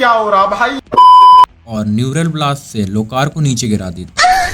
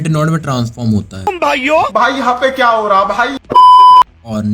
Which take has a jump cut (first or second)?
second